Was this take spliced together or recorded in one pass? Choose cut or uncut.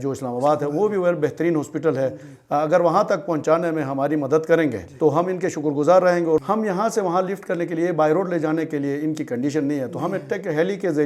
cut